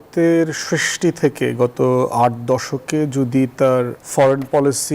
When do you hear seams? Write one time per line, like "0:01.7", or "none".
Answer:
0:04.0